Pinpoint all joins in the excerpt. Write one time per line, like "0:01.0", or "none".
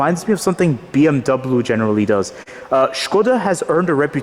0:02.4